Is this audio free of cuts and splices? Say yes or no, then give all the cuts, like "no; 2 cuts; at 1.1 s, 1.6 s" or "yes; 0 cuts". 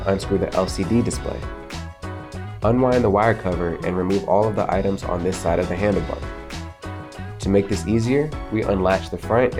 yes; 0 cuts